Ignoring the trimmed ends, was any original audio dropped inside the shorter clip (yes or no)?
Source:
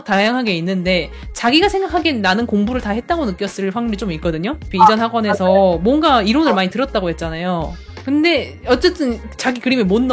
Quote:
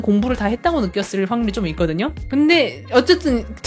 yes